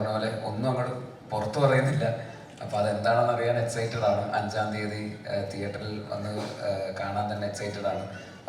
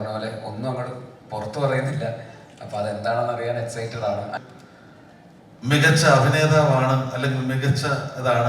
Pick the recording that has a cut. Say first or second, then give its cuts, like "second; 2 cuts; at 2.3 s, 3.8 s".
second; 1 cut; at 4.4 s